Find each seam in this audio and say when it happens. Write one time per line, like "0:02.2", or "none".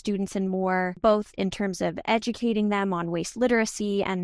0:00.9